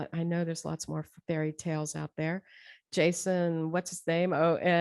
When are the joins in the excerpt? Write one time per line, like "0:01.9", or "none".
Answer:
none